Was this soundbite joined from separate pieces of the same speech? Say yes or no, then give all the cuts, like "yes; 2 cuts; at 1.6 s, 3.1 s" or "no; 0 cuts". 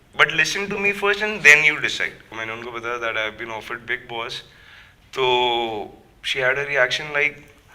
yes; 1 cut; at 2.4 s